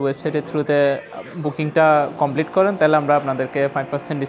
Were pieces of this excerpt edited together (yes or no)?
no